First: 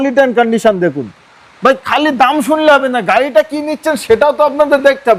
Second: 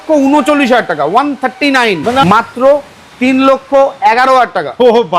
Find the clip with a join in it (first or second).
second